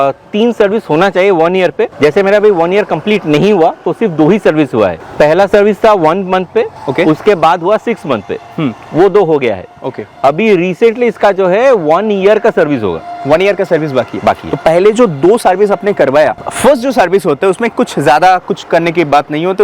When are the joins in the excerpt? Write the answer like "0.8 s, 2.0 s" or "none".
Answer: none